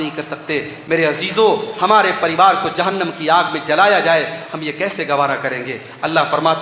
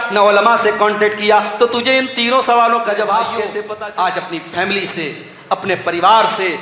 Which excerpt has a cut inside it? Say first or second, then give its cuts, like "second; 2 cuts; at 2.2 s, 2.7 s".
second; 1 cut; at 3.5 s